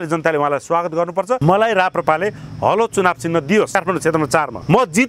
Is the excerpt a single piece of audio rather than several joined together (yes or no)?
no